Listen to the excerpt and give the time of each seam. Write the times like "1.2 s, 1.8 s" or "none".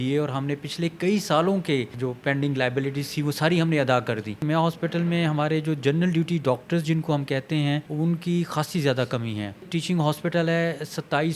1.9 s, 4.4 s, 7.9 s, 9.7 s